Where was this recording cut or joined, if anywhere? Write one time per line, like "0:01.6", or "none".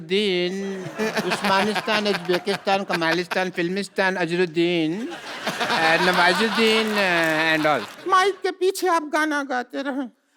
0:07.9